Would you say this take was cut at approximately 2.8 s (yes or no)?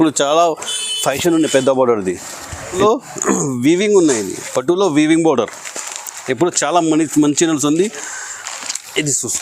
yes